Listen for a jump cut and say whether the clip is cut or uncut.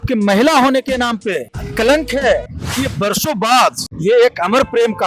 cut